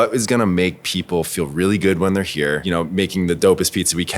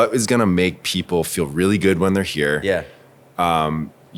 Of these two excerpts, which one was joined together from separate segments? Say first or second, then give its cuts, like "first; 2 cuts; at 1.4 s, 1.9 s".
first; 1 cut; at 2.6 s